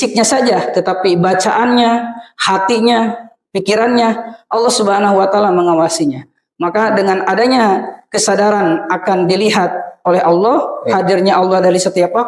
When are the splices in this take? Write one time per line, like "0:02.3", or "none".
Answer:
none

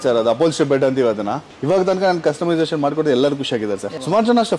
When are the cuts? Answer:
0:01.5

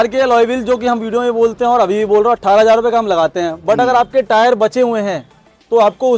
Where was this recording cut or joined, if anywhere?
none

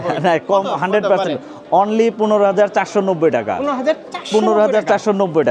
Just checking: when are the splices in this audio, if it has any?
none

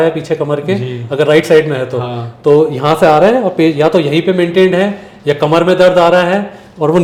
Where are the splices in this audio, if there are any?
none

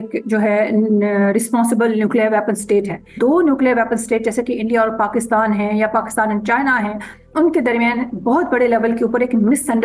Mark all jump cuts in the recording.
0:03.1

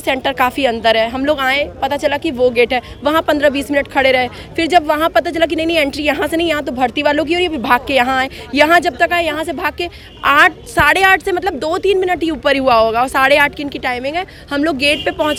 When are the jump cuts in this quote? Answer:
none

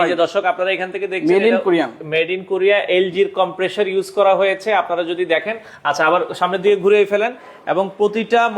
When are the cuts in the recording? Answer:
none

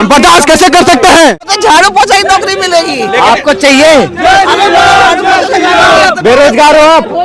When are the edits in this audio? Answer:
0:01.5

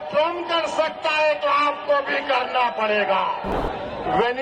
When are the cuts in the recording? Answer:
0:03.5

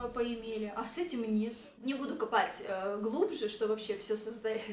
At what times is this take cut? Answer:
0:01.7

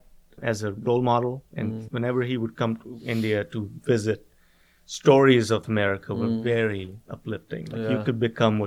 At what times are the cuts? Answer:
0:01.8
0:05.6

